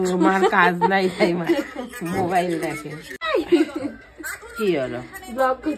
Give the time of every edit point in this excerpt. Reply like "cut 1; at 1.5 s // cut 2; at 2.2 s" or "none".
cut 1; at 3.2 s